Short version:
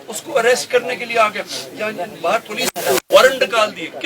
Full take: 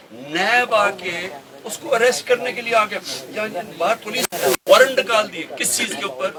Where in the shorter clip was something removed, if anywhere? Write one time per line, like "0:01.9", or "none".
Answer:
none